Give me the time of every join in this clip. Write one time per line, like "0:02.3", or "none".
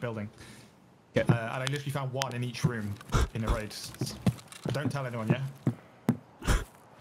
0:04.4